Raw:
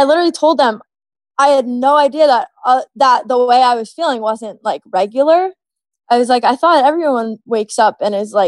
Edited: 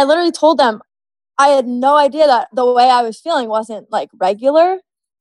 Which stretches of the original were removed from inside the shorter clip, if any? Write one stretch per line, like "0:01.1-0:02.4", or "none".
0:02.5-0:03.3